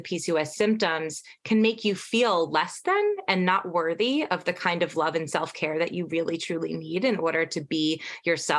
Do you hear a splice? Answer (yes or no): no